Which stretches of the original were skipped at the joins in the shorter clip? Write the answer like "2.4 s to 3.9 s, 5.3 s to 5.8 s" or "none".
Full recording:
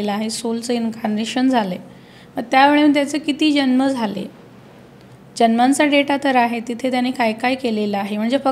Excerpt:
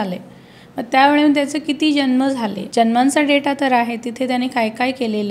4.2 s to 5.3 s